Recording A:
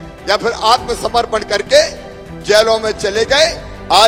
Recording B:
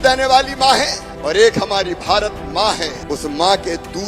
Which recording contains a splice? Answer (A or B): B